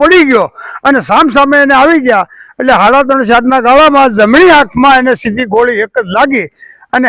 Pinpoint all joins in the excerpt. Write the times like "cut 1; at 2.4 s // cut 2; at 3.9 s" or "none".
none